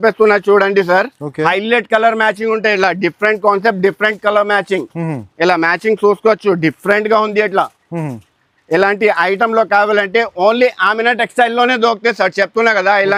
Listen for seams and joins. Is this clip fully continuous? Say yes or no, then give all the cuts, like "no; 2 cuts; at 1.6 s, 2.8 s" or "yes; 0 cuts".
yes; 0 cuts